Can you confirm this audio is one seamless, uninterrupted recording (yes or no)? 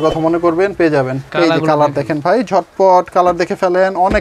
no